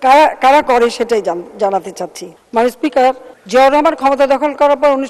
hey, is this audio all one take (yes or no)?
yes